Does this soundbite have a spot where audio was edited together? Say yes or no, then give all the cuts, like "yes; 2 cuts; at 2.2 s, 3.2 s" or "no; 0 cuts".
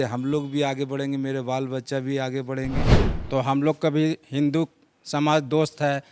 yes; 1 cut; at 2.8 s